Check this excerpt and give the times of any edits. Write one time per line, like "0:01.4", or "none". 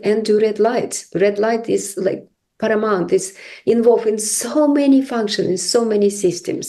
none